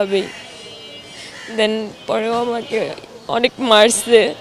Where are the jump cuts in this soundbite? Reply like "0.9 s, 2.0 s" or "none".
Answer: none